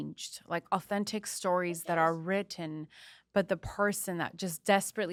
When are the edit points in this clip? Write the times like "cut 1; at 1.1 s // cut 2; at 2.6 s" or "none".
none